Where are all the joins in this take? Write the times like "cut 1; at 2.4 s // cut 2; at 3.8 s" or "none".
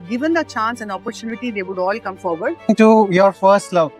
cut 1; at 2.7 s